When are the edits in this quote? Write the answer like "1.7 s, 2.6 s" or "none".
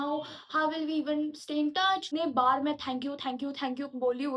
2.0 s